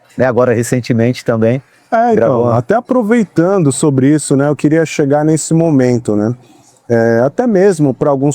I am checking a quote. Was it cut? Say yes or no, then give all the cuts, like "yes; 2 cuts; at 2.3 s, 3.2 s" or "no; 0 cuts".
no; 0 cuts